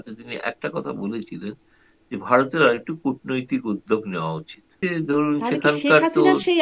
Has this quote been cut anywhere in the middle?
yes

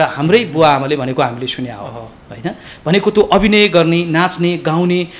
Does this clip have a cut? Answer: no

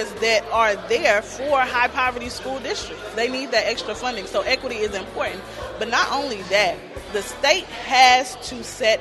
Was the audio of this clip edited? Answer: no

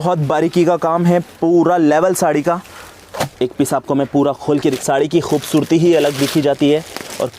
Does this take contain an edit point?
yes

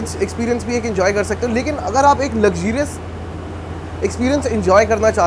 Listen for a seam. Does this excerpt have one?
no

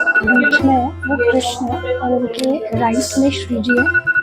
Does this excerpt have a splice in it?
no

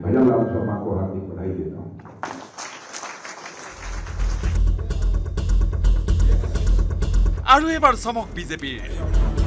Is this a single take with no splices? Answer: no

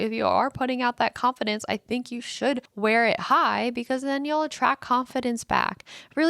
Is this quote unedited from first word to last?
no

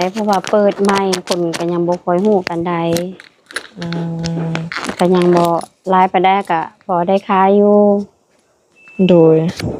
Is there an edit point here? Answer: no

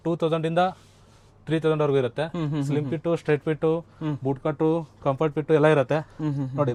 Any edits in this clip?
no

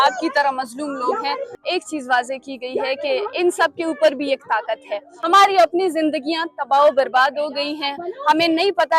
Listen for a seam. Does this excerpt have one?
yes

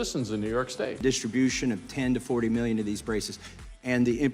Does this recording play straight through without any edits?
no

